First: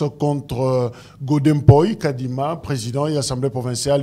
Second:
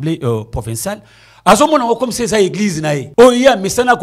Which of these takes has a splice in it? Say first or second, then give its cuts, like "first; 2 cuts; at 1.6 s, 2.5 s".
second; 1 cut; at 3.1 s